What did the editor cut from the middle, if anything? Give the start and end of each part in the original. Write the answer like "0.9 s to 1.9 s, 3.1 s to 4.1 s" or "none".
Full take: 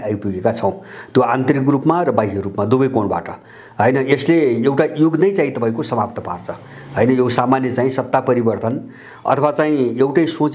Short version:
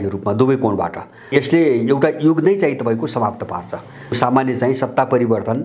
3.6 s to 4.0 s, 6.9 s to 7.3 s